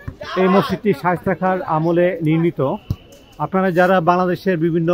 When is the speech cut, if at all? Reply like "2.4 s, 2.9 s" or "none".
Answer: none